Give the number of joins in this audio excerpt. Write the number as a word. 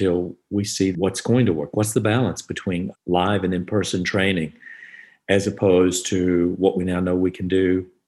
one